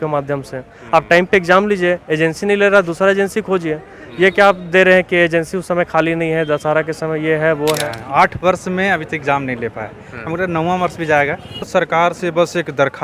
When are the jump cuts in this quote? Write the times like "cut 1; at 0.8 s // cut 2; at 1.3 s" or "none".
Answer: cut 1; at 7.9 s // cut 2; at 11.7 s